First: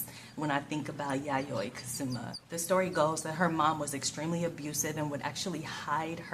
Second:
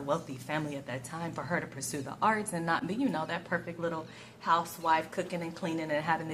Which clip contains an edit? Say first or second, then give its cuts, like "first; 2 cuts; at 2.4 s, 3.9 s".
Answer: first; 1 cut; at 2.5 s